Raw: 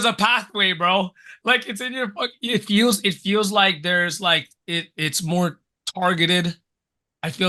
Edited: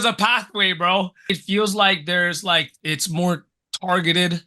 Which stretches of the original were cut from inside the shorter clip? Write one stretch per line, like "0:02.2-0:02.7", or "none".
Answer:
0:01.2-0:03.0
0:04.5-0:04.9